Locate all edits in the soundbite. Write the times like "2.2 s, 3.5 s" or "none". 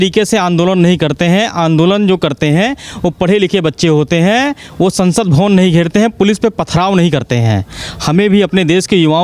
none